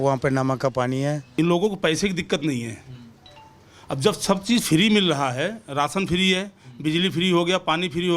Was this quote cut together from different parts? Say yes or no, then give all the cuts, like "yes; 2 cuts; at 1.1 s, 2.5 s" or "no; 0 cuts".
yes; 1 cut; at 1.2 s